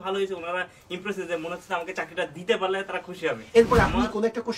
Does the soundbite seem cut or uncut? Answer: cut